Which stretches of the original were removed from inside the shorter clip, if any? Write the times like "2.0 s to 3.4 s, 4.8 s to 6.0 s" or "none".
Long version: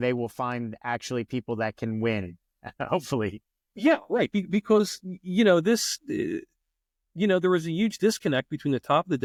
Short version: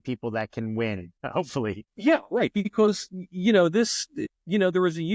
2.8 s to 3.3 s, 4.5 s to 4.6 s, 6.0 s to 6.8 s